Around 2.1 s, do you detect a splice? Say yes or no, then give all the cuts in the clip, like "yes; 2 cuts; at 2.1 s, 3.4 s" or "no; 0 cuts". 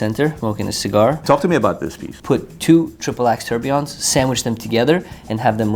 yes; 2 cuts; at 0.9 s, 2.1 s